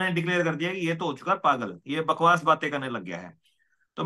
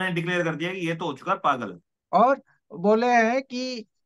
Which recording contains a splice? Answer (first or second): second